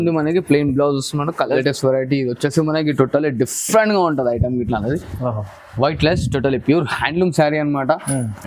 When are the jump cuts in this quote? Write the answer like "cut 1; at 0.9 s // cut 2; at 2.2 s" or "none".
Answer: cut 1; at 1.6 s